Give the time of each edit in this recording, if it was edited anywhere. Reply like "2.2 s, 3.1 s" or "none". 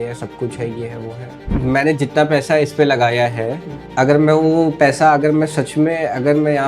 1.4 s